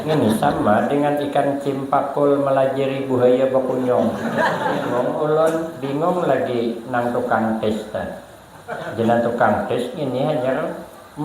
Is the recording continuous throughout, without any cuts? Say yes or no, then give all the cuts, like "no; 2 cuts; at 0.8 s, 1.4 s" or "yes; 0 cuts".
no; 1 cut; at 4.9 s